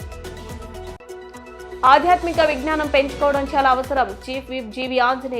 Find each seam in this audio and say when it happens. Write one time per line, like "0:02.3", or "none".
0:00.9